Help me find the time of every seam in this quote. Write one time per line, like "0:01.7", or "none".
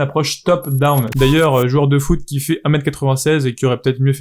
0:01.1